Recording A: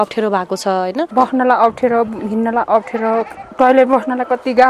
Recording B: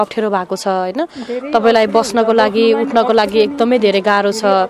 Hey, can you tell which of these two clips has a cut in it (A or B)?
A